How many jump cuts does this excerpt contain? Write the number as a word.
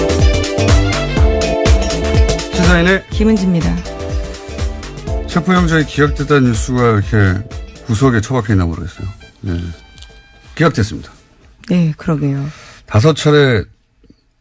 zero